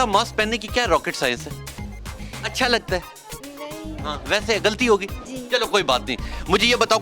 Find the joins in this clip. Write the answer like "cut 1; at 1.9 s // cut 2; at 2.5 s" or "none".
none